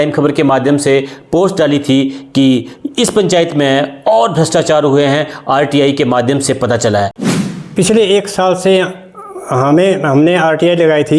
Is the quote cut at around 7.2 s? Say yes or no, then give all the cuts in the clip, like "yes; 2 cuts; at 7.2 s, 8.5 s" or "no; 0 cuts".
yes; 1 cut; at 7.2 s